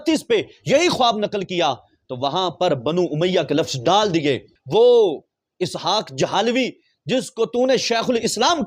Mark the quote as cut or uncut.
cut